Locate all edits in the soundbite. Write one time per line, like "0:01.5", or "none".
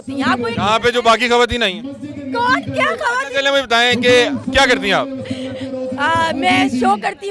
none